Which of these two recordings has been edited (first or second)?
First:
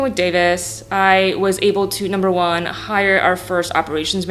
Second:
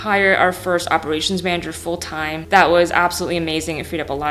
second